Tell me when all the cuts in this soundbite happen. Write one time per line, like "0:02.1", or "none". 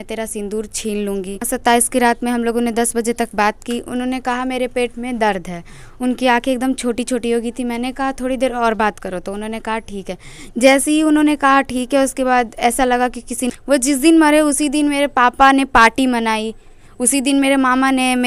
0:01.5
0:13.5